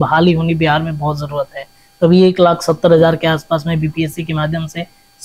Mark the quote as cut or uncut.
uncut